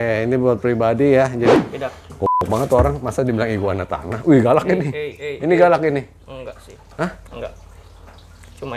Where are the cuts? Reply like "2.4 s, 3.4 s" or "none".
1.5 s